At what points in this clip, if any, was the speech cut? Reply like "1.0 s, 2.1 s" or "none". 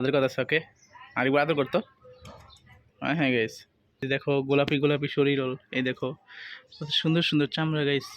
4.1 s